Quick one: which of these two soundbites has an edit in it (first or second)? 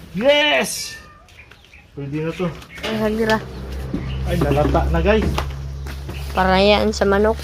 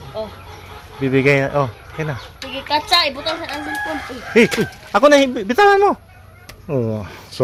first